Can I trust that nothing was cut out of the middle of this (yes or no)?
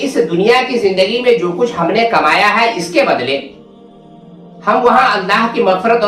yes